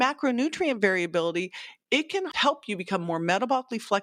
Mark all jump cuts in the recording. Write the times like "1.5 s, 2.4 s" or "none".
2.3 s